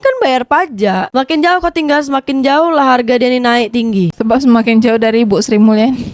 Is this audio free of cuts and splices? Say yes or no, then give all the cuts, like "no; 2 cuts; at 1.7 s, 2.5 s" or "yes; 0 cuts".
no; 1 cut; at 1.1 s